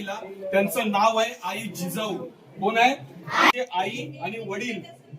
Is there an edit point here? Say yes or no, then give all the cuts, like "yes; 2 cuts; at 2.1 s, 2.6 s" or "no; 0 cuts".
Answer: yes; 1 cut; at 3.5 s